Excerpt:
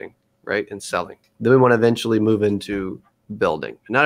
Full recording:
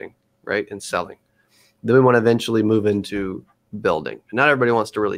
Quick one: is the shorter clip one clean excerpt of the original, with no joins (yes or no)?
no